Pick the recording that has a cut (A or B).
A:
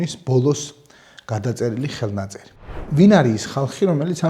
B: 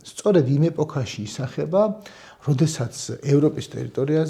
A